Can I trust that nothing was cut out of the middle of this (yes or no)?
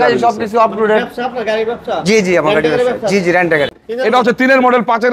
no